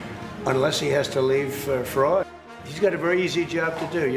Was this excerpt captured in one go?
no; 1 cut; at 2.4 s

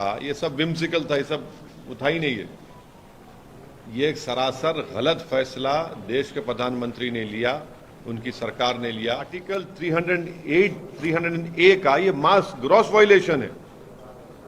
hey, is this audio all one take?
no; 1 cut; at 9.6 s

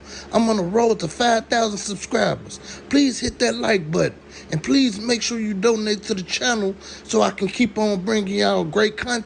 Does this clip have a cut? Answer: no; 0 cuts

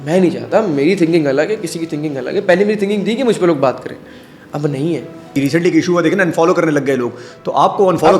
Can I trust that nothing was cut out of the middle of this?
no; 1 cut; at 5.3 s

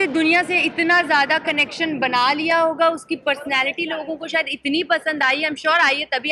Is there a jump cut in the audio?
no; 0 cuts

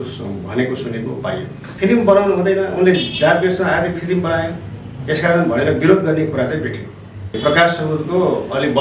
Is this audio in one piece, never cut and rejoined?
no; 2 cuts; at 1.7 s, 7.4 s

